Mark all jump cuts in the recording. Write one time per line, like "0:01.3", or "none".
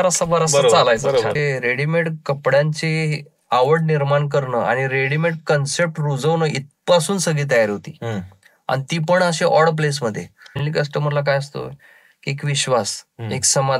0:01.4
0:10.6